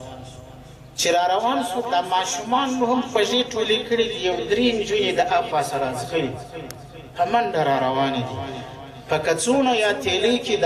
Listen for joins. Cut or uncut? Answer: uncut